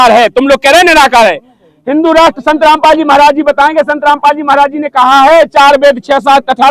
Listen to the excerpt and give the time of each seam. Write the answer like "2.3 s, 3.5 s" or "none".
none

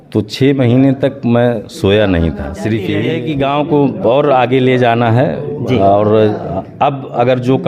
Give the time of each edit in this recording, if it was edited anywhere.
3.0 s

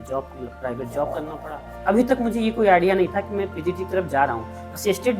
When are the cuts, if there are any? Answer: 1.7 s

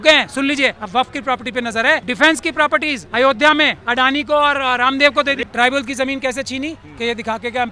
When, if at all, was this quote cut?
0.8 s, 2.1 s, 3.0 s, 3.8 s, 5.4 s

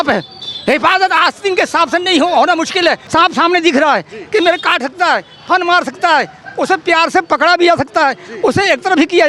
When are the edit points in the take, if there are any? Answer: 3.0 s

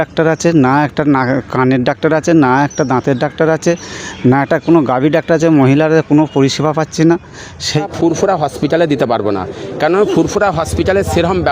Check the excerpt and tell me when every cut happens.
7.9 s

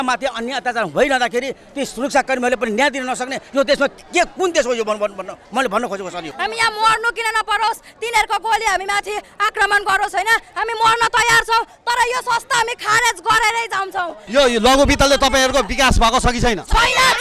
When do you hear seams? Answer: 6.2 s, 14.2 s

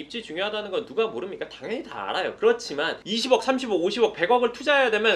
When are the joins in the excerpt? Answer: 3.0 s

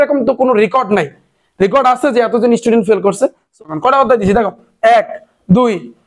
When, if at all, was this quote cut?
3.5 s

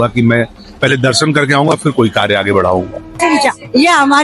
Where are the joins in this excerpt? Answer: 3.2 s

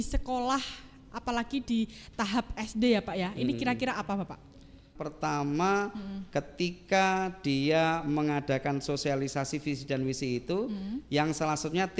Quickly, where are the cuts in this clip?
5.0 s

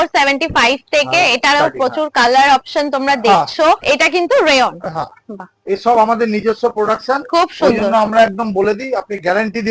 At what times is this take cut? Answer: none

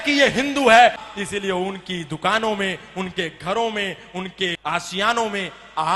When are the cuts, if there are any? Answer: 1.0 s, 4.6 s

